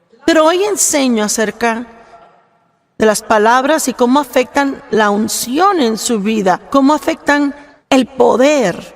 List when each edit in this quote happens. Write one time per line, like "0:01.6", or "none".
0:07.7